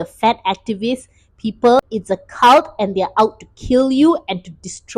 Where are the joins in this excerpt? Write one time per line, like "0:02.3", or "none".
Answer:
0:01.8